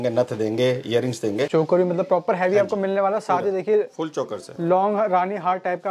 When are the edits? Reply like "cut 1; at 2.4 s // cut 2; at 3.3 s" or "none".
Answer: cut 1; at 1.5 s